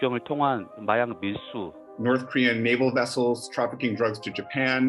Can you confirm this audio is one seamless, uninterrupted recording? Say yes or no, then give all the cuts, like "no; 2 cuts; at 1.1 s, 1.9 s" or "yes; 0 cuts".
no; 1 cut; at 1.8 s